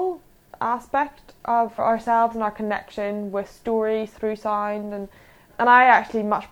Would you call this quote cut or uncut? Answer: cut